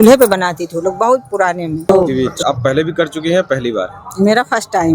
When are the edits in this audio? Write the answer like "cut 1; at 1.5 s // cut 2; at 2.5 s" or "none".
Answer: cut 1; at 1.9 s